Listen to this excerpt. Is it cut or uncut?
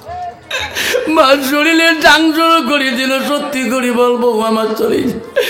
uncut